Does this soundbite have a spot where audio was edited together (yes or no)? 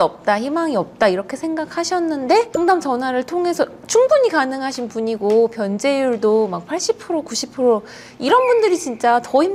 no